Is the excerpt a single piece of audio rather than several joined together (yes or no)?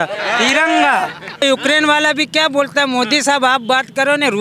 no